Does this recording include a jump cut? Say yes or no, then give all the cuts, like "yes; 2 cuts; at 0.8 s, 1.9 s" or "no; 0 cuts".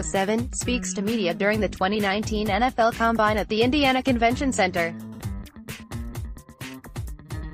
yes; 1 cut; at 5.0 s